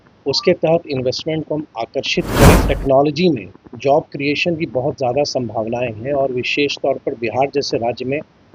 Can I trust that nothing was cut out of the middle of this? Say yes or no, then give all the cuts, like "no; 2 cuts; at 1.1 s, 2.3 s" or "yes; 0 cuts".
no; 1 cut; at 2.6 s